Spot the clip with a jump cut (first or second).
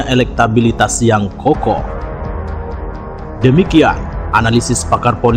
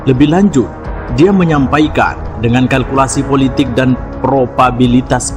first